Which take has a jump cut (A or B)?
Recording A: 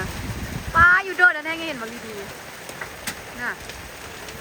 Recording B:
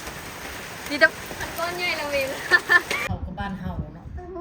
B